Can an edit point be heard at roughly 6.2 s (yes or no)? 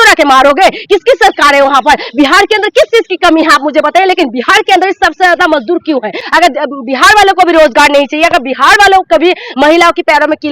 yes